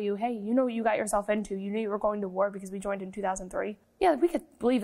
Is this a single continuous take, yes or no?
no